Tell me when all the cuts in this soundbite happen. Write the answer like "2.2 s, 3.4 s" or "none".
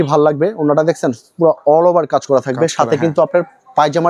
none